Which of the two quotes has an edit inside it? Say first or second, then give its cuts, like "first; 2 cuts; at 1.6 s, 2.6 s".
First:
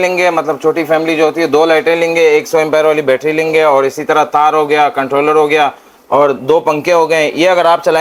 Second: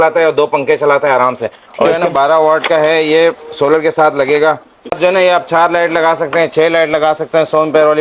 second; 2 cuts; at 1.9 s, 5.0 s